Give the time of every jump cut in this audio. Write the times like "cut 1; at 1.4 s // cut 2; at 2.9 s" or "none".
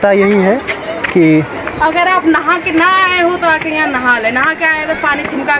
none